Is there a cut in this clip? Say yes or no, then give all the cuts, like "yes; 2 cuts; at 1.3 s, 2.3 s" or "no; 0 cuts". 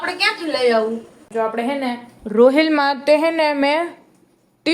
yes; 1 cut; at 1.2 s